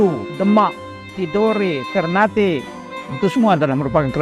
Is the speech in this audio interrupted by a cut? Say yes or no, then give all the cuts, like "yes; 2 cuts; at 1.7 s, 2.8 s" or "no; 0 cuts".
yes; 1 cut; at 1.1 s